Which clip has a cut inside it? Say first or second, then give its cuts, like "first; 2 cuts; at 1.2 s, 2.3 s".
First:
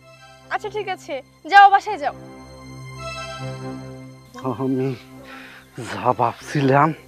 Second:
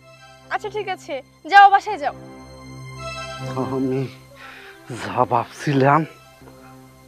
second; 1 cut; at 3.5 s